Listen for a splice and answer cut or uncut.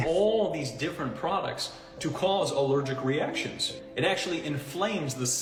uncut